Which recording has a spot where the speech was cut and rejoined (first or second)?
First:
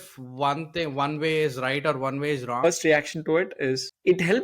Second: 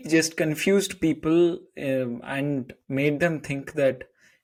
first